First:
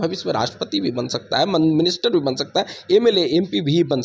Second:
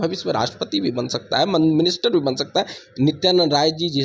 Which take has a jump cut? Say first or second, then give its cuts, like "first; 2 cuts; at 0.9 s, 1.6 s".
second; 1 cut; at 2.8 s